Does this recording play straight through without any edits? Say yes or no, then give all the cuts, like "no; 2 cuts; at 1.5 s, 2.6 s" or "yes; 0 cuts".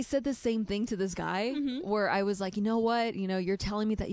yes; 0 cuts